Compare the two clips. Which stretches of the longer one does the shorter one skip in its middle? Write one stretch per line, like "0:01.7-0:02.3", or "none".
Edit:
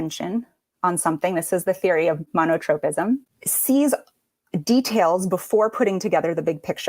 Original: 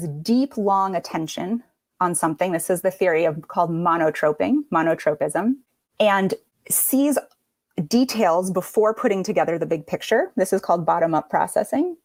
0:03.5-0:04.7
0:05.8-0:06.6